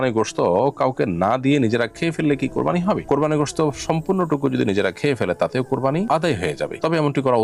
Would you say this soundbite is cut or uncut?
uncut